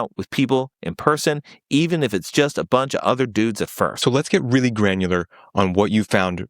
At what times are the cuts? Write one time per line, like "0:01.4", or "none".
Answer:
0:04.0